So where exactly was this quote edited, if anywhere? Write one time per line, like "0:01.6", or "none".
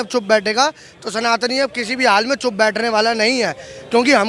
none